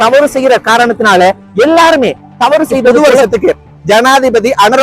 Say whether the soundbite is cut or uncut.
cut